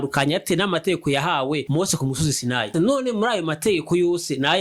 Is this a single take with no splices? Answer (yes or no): no